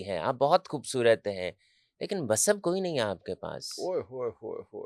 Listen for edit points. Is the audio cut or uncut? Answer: uncut